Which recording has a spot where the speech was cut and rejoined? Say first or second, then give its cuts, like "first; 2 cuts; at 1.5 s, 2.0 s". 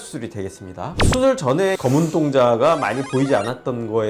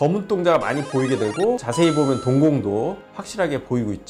first; 1 cut; at 1.0 s